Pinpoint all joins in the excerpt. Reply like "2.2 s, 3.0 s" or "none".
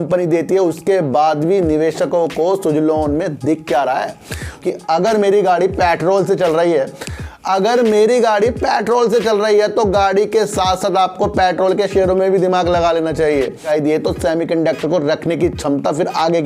4.6 s, 13.7 s

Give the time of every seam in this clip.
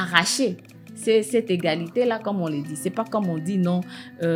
none

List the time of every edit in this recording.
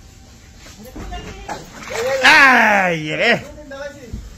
1.5 s

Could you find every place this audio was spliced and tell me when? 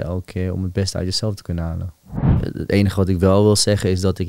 2.4 s

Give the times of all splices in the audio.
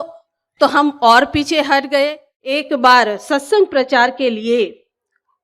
2.6 s

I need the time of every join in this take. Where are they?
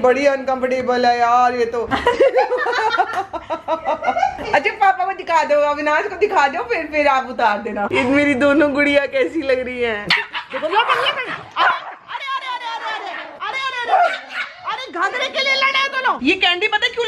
1.9 s, 7.9 s, 10.1 s, 16.2 s

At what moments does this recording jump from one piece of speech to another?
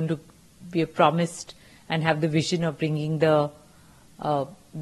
none

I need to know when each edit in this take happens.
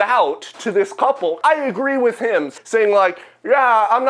1.4 s, 2.5 s

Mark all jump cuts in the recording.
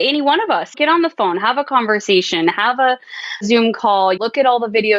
none

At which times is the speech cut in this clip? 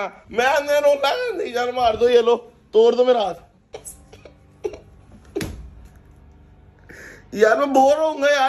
3.8 s

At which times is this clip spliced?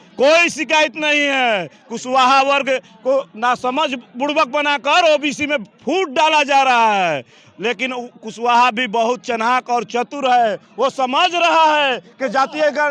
none

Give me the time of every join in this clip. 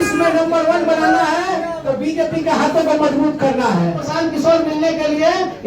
4.0 s

